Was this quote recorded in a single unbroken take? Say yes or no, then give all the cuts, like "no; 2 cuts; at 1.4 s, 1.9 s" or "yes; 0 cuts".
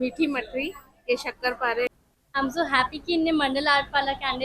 no; 1 cut; at 1.9 s